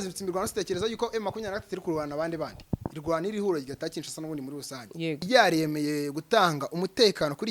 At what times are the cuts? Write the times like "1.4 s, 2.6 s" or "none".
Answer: 5.2 s